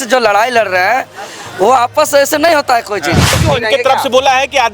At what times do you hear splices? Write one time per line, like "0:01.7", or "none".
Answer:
0:03.4